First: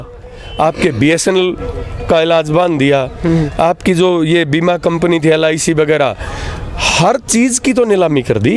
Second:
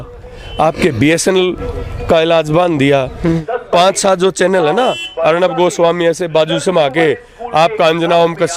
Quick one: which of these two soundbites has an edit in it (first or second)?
second